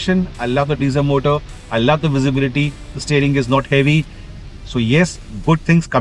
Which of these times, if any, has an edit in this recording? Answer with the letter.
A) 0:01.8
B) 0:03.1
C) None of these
C